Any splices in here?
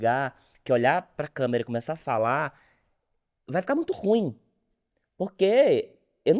no; 0 cuts

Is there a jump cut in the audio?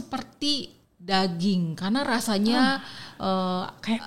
no; 0 cuts

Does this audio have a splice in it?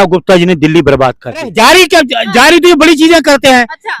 yes; 1 cut; at 1.5 s

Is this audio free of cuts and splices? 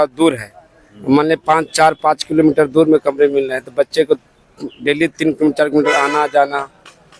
yes; 0 cuts

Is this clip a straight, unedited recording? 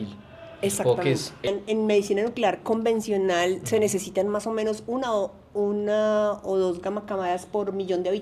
no; 1 cut; at 1.5 s

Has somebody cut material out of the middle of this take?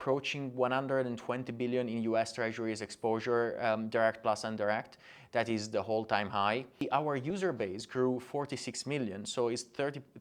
yes; 1 cut; at 6.8 s

